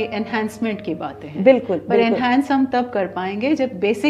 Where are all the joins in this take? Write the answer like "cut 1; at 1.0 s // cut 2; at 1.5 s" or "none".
none